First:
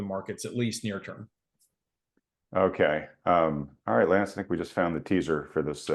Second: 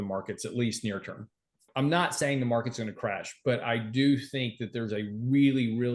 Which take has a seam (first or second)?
second